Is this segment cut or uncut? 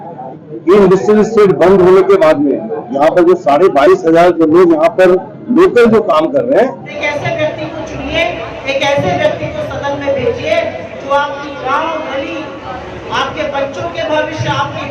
cut